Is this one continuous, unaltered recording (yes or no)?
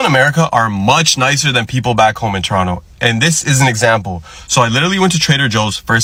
yes